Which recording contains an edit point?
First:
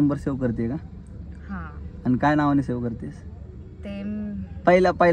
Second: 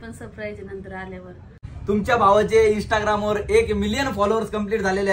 second; 1 cut; at 1.7 s

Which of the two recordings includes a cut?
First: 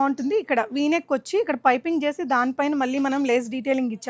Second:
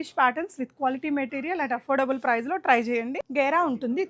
second; 1 cut; at 3.2 s

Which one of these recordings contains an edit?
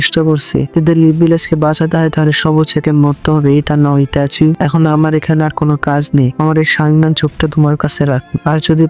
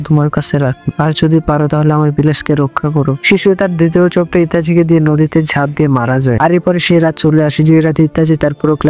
second; 1 cut; at 6.4 s

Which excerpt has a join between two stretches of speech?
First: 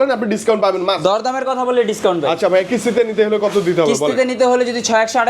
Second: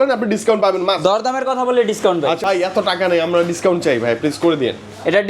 second; 1 cut; at 2.4 s

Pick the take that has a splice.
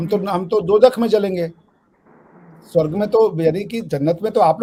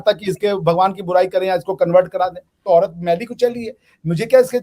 second; 1 cut; at 2.6 s

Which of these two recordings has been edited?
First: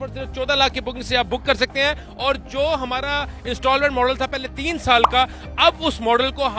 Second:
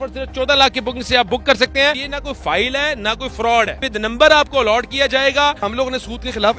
second; 3 cuts; at 2.1 s, 3.9 s, 5.7 s

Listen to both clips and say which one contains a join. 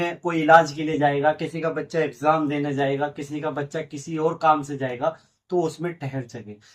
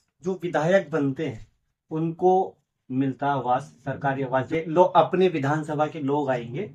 second; 2 cuts; at 2.6 s, 4.5 s

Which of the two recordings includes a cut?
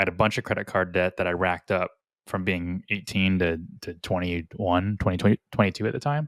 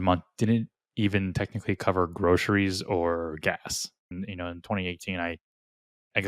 second; 1 cut; at 4.2 s

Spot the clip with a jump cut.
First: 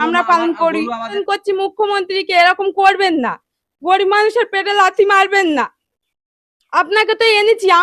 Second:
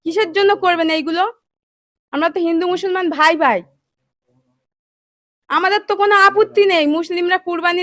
first; 1 cut; at 1.1 s

